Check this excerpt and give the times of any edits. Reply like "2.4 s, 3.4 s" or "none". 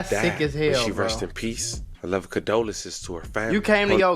none